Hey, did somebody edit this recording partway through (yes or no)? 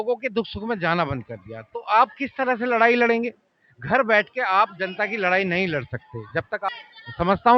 yes